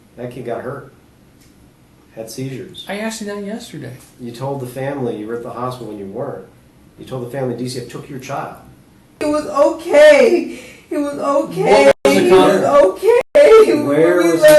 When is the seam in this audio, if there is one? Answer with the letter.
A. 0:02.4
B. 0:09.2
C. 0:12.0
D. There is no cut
B